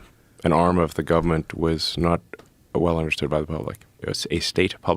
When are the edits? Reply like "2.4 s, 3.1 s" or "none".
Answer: 4.0 s